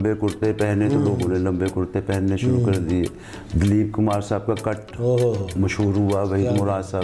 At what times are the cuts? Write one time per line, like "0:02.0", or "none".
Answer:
none